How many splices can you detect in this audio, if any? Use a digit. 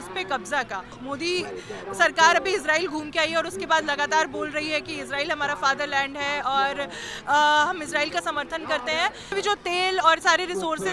2